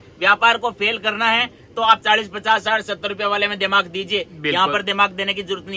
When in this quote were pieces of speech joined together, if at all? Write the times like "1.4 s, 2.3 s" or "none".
none